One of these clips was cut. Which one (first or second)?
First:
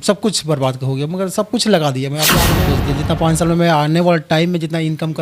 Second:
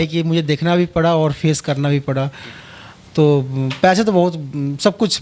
first